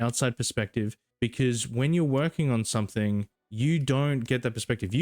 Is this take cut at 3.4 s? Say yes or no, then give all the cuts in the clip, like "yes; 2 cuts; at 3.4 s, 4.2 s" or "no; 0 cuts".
yes; 2 cuts; at 1.0 s, 3.4 s